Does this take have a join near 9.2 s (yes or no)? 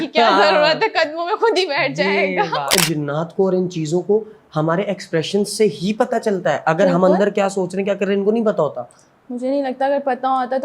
no